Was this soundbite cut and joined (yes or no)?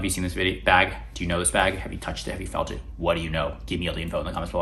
no